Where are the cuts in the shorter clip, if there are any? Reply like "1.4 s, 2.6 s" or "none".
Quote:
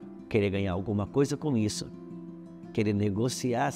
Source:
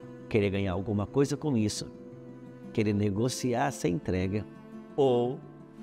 none